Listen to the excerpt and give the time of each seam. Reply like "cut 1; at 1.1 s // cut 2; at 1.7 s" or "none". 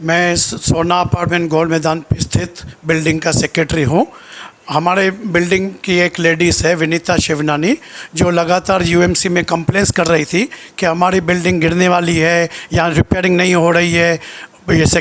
none